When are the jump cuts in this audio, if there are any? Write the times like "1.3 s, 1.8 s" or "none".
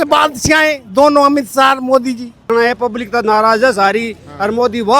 2.5 s